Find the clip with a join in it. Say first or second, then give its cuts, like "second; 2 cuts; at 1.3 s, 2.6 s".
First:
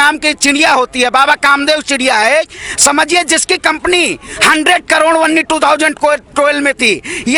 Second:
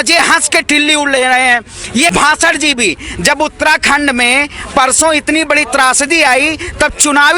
second; 1 cut; at 2.1 s